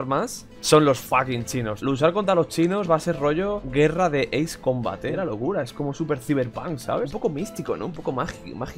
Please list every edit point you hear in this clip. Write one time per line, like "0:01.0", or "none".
0:01.7
0:05.1
0:07.1

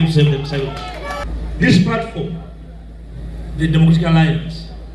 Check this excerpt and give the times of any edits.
0:01.2

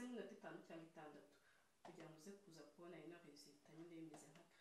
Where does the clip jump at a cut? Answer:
none

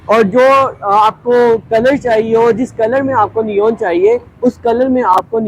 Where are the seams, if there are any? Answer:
none

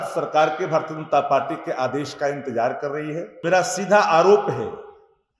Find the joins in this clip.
0:03.4

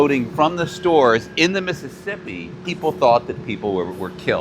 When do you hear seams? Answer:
0:02.6

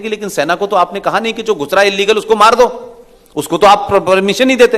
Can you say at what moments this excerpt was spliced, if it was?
none

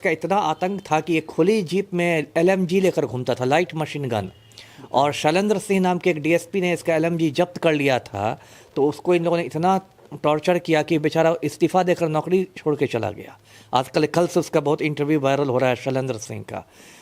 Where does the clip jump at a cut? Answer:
none

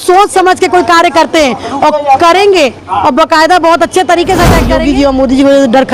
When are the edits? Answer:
0:04.7

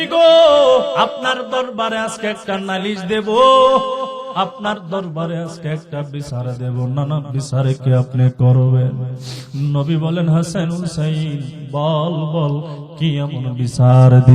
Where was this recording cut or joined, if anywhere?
0:01.0

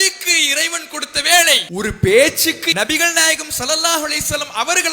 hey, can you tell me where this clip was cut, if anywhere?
0:01.6
0:02.6

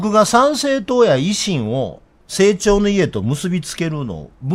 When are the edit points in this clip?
none

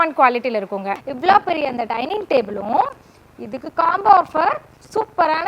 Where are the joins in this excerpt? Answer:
0:01.0

